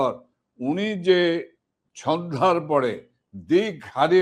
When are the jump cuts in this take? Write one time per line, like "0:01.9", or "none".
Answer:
none